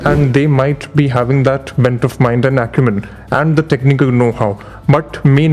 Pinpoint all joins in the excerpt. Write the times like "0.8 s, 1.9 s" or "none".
none